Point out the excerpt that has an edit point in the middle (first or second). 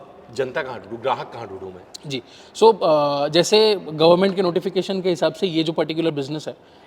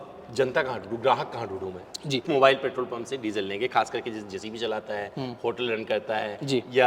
second